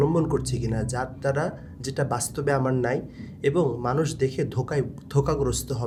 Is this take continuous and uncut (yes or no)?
yes